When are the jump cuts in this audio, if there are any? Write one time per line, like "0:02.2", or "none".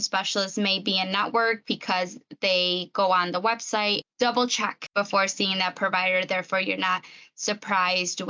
0:04.0
0:04.9